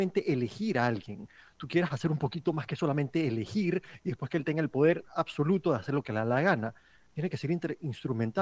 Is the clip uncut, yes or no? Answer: yes